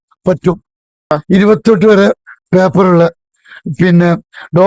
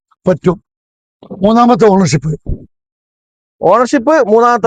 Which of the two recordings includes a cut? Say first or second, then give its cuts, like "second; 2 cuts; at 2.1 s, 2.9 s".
first; 1 cut; at 1.0 s